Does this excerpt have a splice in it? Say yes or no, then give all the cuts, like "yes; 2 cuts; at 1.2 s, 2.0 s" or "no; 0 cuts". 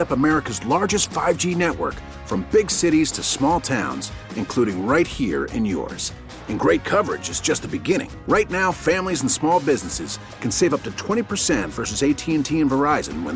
no; 0 cuts